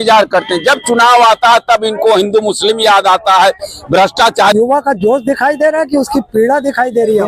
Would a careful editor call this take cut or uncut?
cut